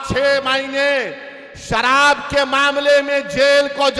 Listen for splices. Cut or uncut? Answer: uncut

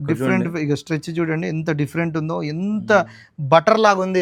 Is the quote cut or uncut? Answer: uncut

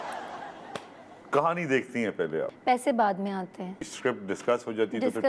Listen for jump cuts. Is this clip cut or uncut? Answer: cut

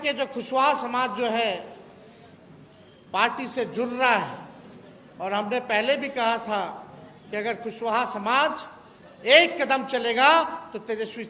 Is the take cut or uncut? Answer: uncut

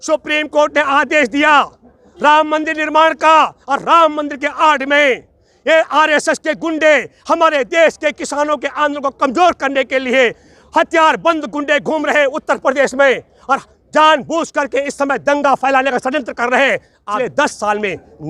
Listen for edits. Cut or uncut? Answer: cut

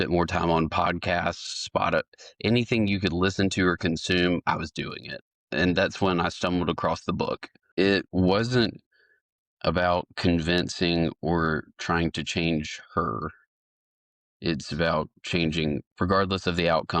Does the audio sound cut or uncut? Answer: cut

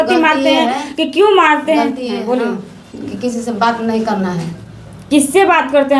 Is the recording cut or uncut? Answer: uncut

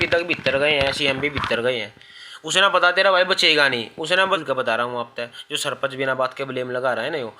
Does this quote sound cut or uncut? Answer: cut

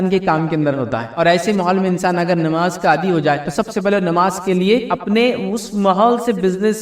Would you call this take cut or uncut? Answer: cut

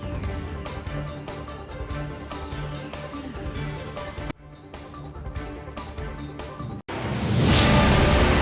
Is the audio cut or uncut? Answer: cut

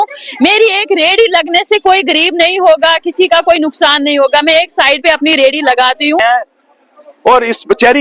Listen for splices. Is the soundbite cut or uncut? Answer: cut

